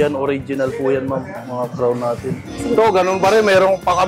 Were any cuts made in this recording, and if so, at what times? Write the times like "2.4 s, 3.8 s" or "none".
2.5 s